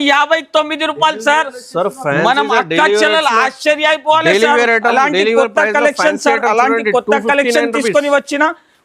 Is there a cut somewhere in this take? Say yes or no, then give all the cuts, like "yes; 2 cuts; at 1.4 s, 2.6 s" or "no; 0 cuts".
no; 0 cuts